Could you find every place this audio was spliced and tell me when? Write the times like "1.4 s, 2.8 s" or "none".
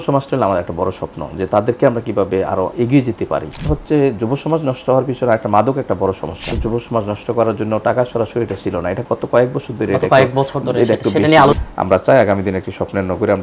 3.7 s, 6.5 s, 11.6 s